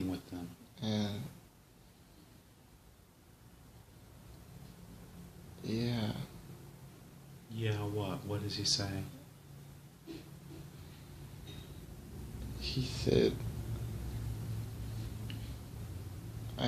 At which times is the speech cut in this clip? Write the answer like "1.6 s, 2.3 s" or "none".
none